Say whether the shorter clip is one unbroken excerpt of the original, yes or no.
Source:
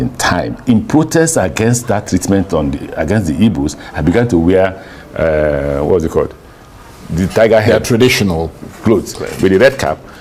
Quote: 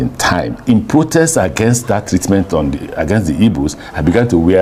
yes